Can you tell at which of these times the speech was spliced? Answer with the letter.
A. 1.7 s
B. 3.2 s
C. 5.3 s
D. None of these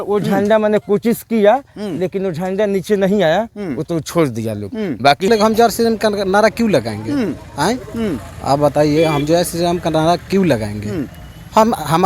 C